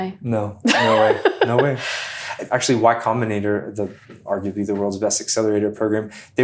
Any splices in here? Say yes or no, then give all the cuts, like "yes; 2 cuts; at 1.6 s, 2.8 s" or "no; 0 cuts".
yes; 2 cuts; at 2.4 s, 4.1 s